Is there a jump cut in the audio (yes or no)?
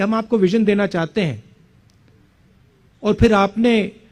no